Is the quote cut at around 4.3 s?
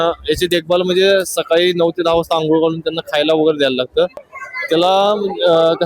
yes; 1 cut; at 4.3 s

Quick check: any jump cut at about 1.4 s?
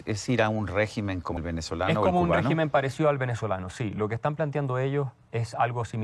yes; 1 cut; at 1.4 s

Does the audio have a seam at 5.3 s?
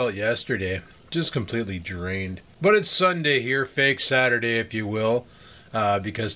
no; 1 cut; at 2.4 s

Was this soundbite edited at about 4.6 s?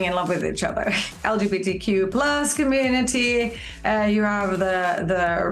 no; 1 cut; at 1.0 s

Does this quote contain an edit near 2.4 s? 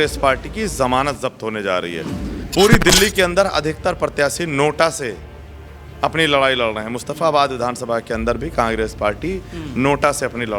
yes; 1 cut; at 2.4 s

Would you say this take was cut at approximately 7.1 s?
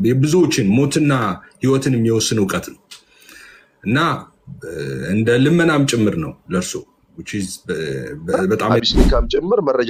no; 1 cut; at 8.8 s

